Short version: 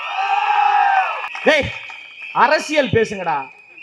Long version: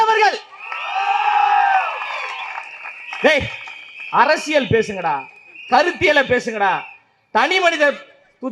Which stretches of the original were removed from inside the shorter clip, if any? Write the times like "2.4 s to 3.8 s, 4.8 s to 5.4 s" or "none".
2.0 s to 3.0 s